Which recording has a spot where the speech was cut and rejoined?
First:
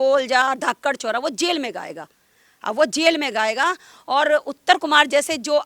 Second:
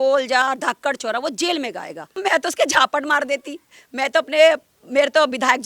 second; 1 cut; at 2.0 s

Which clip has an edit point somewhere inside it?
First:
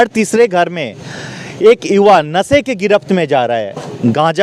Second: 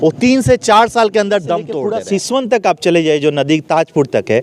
second; 1 cut; at 1.7 s

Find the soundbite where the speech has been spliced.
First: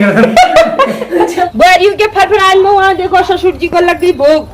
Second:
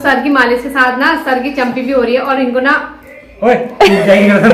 first; 1 cut; at 1.5 s

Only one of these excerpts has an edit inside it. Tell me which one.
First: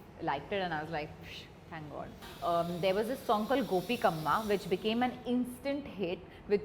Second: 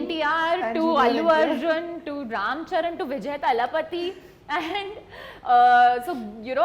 first; 1 cut; at 2.2 s

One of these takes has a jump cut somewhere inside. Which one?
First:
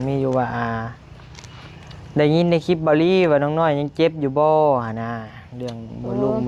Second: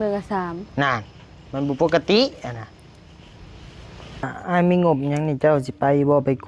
second; 1 cut; at 4.4 s

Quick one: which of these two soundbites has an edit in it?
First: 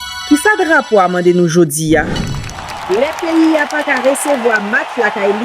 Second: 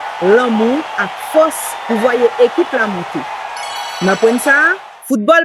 first; 1 cut; at 2.2 s

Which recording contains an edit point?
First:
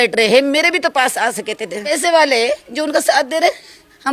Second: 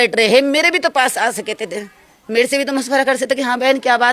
first; 1 cut; at 1.8 s

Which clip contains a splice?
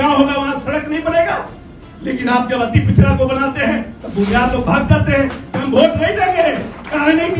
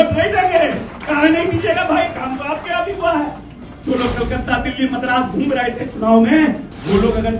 second; 1 cut; at 3.7 s

